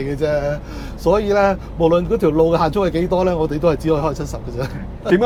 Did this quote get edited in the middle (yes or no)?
no